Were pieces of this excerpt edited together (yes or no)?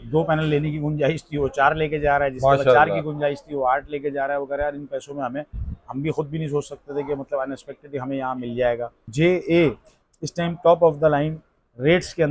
yes